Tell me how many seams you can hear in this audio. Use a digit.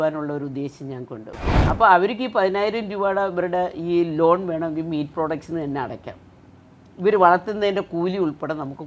1